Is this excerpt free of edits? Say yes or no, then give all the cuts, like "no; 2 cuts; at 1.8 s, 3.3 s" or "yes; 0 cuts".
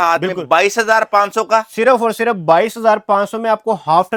yes; 0 cuts